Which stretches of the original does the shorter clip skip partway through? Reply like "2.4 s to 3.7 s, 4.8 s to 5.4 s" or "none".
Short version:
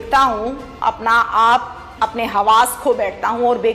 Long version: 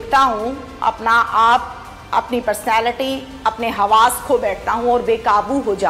1.8 s to 3.3 s